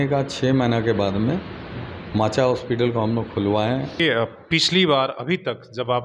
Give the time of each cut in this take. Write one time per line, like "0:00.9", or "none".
0:04.0